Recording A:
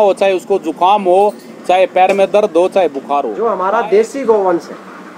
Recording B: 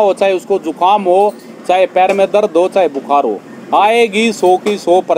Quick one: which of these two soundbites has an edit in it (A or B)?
A